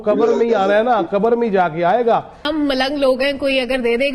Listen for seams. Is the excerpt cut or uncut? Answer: cut